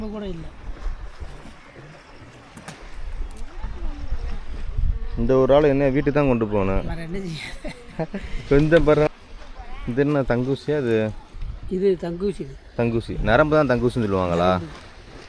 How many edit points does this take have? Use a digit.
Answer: 1